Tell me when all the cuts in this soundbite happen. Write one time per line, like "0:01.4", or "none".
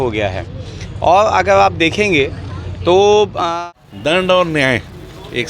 0:03.4